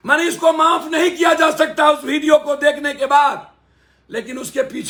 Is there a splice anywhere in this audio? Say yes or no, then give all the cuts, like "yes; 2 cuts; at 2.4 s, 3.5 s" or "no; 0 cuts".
no; 0 cuts